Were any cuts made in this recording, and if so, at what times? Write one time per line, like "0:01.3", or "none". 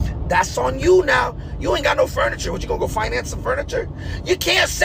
none